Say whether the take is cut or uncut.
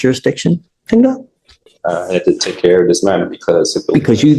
uncut